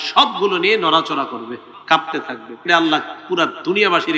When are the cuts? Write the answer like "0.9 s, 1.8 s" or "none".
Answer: 1.7 s, 2.6 s